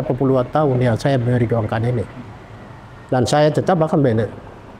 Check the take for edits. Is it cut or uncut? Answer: uncut